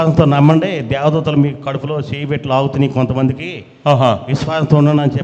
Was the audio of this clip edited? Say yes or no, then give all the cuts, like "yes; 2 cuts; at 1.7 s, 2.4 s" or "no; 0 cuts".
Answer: no; 0 cuts